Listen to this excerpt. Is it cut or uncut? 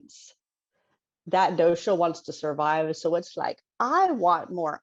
uncut